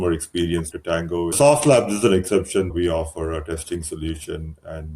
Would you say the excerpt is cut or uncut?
cut